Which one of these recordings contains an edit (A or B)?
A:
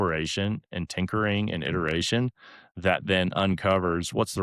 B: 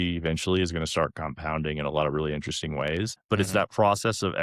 B